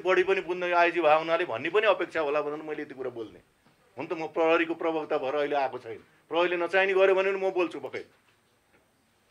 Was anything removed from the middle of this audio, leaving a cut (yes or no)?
no